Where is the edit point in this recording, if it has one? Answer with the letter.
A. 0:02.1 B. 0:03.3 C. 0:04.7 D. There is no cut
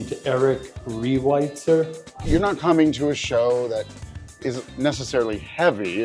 A